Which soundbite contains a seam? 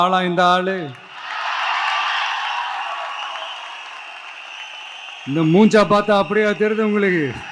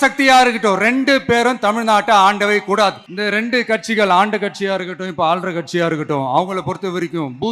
second; 1 cut; at 3.1 s

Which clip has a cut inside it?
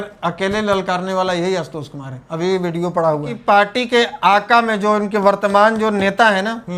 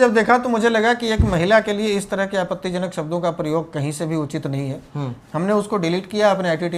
first; 1 cut; at 3.3 s

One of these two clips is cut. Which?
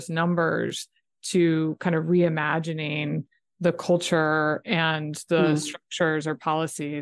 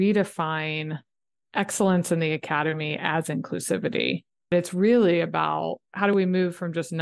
second; 2 cuts; at 4.5 s, 5.8 s

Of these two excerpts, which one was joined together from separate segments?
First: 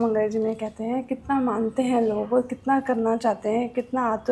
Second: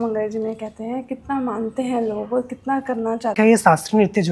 second; 1 cut; at 3.3 s

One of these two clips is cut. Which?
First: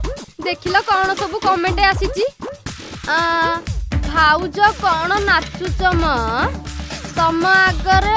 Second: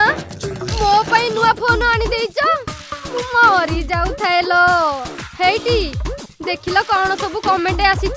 second; 1 cut; at 5.0 s

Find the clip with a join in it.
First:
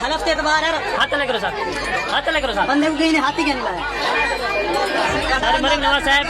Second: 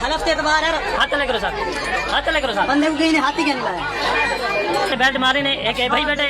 second; 1 cut; at 4.9 s

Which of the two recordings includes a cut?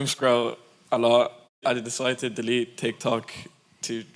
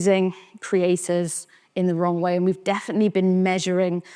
first; 1 cut; at 1.4 s

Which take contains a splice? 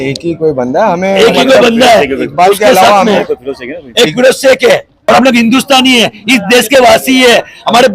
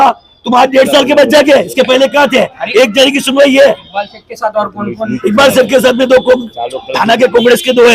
first; 1 cut; at 4.9 s

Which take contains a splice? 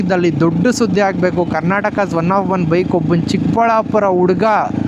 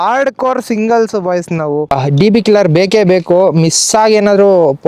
second; 1 cut; at 1.9 s

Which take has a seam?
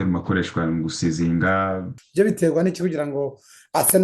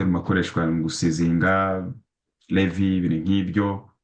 first; 1 cut; at 2.0 s

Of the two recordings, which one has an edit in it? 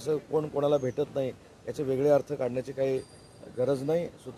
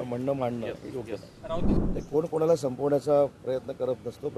second; 1 cut; at 1.7 s

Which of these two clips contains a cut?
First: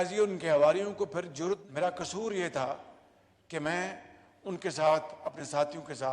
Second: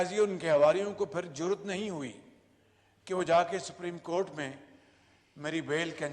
first; 1 cut; at 1.6 s

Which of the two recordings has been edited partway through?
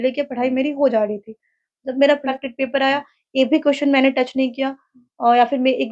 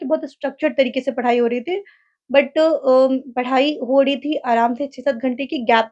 first; 1 cut; at 2.2 s

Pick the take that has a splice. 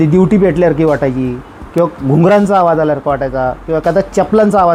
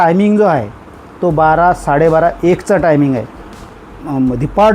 second; 1 cut; at 3.7 s

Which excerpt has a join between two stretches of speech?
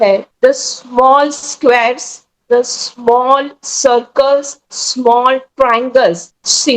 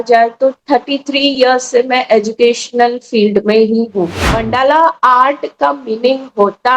second; 1 cut; at 4.2 s

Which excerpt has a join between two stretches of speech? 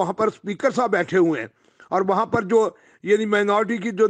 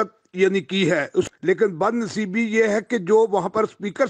second; 1 cut; at 1.3 s

